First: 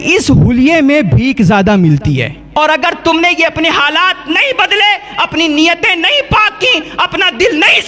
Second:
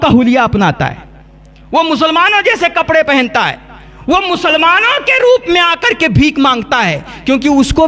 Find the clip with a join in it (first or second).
first